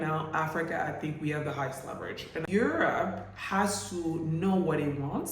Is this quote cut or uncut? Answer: cut